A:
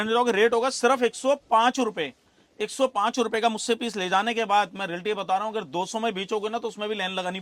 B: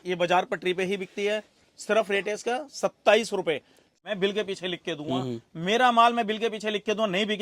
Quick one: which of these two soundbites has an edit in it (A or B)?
B